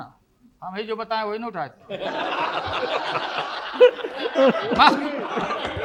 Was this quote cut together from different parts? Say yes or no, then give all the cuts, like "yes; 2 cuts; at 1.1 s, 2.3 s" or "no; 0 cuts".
no; 0 cuts